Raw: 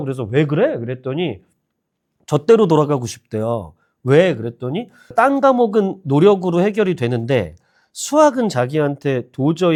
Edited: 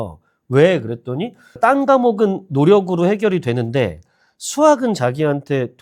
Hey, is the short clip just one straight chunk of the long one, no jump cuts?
yes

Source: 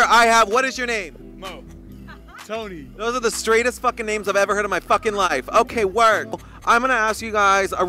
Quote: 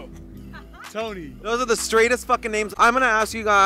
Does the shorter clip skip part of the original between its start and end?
yes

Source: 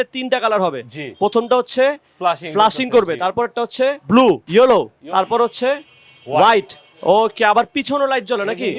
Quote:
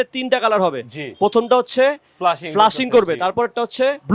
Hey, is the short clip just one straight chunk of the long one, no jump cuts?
yes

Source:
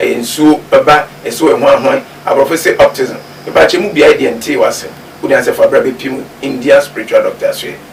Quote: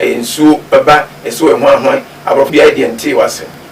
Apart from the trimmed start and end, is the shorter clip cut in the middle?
yes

